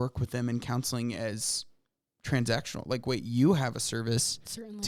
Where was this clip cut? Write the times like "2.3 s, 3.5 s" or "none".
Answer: none